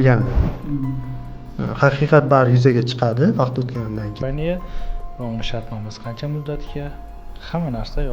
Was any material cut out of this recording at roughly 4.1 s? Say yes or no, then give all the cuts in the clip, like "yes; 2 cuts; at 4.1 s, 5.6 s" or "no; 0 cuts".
yes; 1 cut; at 4.1 s